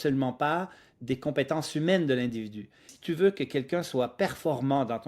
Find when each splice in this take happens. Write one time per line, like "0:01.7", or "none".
0:02.9